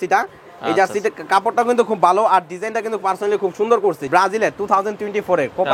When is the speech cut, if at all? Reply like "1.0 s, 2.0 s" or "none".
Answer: 4.0 s